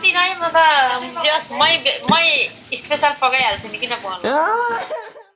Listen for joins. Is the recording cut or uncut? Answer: uncut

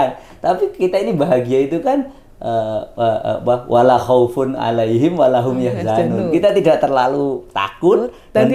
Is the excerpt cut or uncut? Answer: uncut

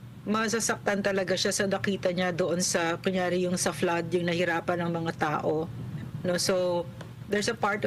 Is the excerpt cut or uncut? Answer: uncut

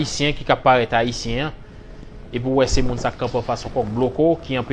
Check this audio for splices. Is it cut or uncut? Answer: uncut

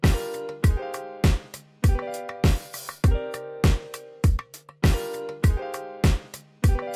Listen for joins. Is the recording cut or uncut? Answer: cut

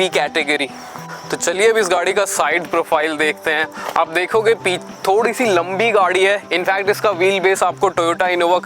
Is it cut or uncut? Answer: uncut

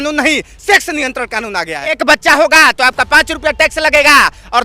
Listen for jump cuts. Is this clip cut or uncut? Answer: cut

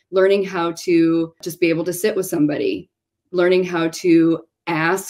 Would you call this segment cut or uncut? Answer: cut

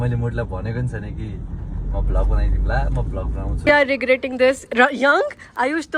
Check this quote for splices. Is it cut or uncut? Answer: cut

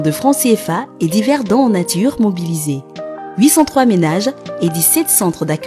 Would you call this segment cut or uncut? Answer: uncut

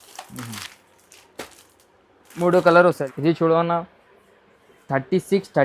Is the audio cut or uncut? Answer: cut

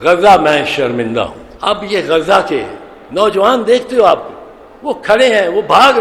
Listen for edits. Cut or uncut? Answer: cut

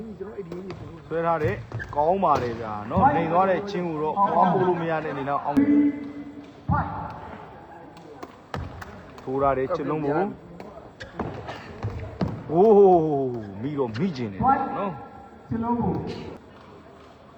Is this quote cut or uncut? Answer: uncut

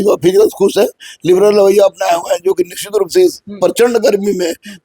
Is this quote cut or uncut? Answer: uncut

